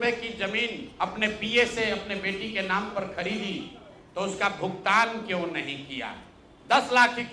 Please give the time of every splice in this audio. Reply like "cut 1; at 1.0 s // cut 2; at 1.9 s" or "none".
none